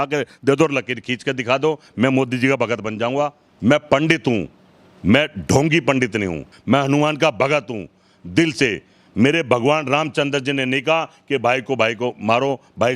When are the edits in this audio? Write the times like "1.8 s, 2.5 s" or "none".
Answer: 3.4 s, 6.5 s